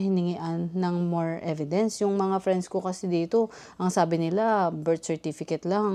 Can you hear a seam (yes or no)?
no